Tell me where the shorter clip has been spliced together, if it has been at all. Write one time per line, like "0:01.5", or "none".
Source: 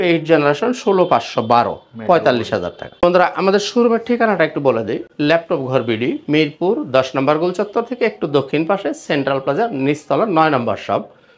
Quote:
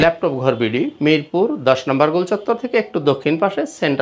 none